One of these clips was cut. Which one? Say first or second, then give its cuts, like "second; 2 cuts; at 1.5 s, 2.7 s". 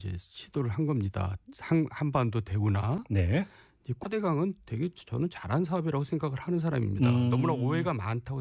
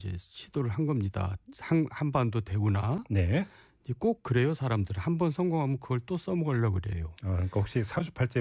second; 1 cut; at 4.0 s